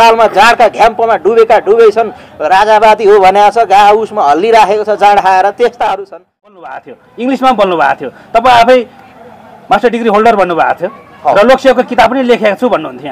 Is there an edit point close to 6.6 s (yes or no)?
yes